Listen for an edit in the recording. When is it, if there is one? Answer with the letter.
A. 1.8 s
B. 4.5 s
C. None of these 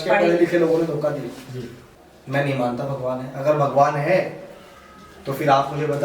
A